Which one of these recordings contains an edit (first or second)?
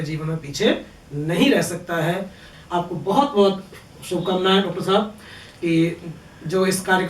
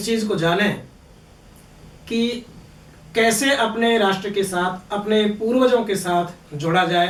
first